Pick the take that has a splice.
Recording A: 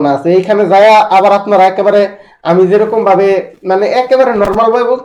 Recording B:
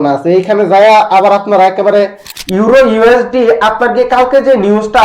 B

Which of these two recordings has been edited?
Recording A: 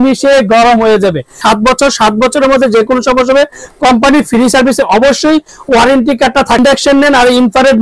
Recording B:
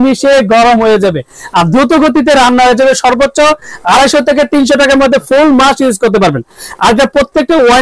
A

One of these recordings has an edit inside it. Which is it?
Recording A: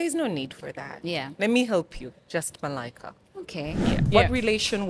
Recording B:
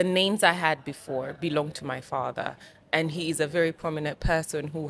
A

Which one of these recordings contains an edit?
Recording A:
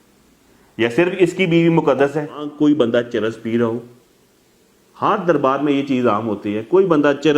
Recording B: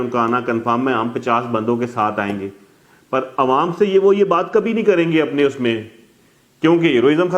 A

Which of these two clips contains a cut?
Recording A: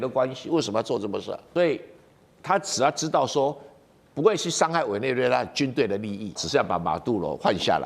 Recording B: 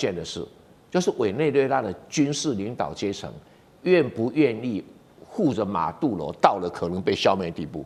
A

